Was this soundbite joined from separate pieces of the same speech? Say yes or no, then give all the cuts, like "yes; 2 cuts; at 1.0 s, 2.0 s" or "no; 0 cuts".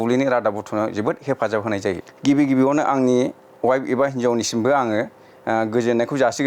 yes; 1 cut; at 2.1 s